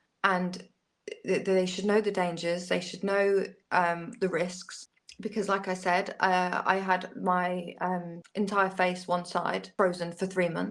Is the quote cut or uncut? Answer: cut